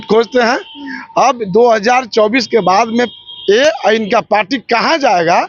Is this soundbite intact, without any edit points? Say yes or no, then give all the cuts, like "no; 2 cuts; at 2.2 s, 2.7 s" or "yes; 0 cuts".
yes; 0 cuts